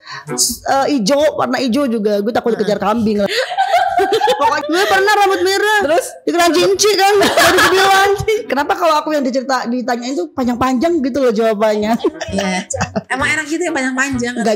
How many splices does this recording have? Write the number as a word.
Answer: three